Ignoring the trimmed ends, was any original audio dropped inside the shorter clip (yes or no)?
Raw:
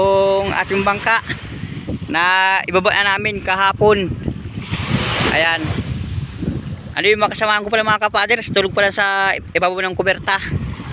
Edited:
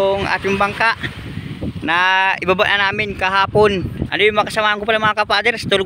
yes